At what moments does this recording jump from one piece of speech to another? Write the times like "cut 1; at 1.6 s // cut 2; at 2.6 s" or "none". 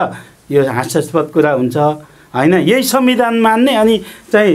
none